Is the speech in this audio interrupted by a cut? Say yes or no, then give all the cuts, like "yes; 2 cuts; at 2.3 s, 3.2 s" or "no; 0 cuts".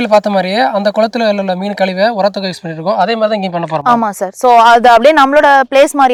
no; 0 cuts